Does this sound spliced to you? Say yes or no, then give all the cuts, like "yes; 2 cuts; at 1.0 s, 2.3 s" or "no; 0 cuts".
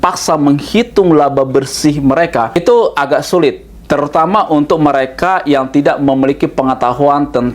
yes; 1 cut; at 2.6 s